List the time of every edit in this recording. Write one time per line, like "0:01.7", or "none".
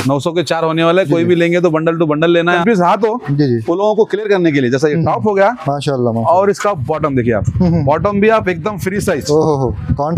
0:02.6